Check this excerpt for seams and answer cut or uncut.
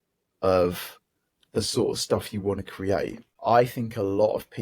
cut